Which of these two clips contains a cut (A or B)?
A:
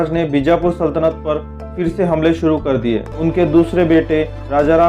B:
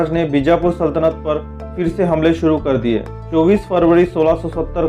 A